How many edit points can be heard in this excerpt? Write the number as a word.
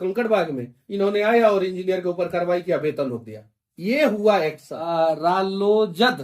one